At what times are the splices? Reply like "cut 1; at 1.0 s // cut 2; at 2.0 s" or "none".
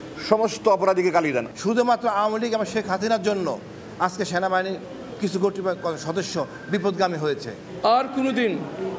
none